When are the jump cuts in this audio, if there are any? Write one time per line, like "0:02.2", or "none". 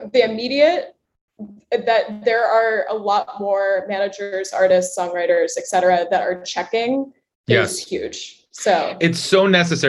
none